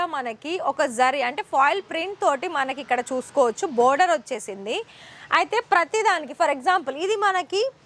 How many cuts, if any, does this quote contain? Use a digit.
0